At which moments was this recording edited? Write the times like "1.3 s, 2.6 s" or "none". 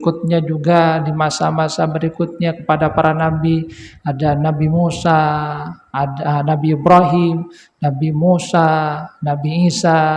none

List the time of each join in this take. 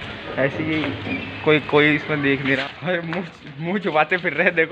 2.6 s

